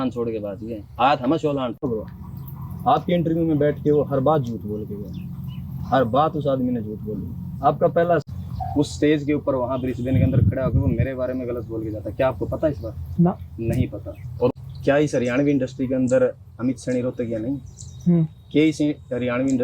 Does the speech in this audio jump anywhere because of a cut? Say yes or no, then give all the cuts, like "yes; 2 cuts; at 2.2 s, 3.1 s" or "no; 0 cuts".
yes; 3 cuts; at 1.8 s, 8.2 s, 14.6 s